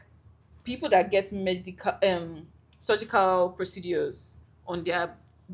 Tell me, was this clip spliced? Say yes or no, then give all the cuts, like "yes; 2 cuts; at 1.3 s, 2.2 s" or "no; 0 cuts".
no; 0 cuts